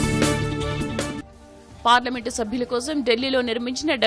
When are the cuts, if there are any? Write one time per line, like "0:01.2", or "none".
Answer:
0:01.2